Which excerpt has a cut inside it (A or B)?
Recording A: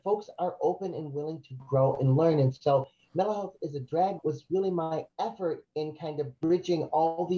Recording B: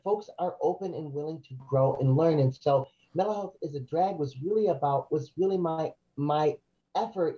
A